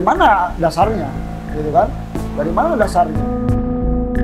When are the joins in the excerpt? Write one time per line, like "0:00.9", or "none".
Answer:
0:03.2